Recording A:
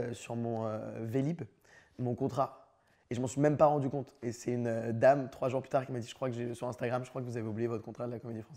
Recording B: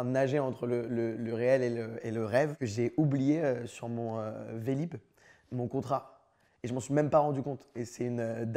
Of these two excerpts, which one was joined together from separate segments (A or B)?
B